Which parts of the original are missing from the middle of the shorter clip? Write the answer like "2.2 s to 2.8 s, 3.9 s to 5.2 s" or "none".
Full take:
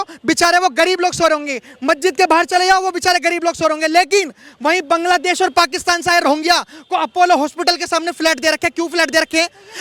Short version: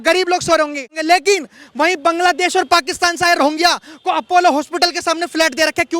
1.7 s to 3.8 s